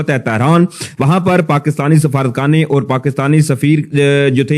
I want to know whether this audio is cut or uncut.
uncut